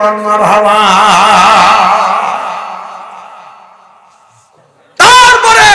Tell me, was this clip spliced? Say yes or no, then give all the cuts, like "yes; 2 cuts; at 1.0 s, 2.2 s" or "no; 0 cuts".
yes; 1 cut; at 4.4 s